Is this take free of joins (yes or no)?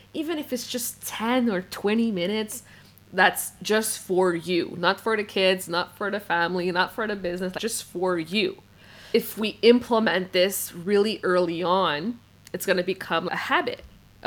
no